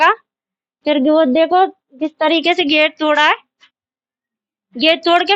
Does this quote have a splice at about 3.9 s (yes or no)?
no